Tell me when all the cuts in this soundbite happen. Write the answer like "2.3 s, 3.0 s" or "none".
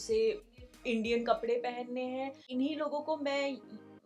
2.4 s